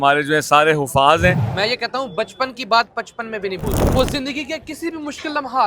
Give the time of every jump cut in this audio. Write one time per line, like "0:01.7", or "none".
0:01.5
0:03.7